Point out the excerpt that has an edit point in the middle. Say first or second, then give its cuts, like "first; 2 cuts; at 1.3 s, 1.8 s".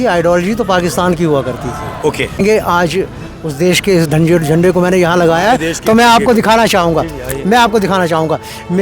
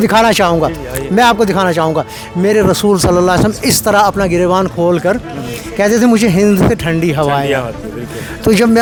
first; 1 cut; at 2.4 s